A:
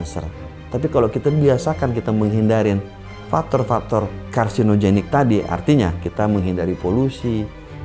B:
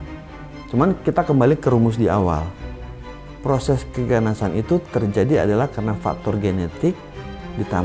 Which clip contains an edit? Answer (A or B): A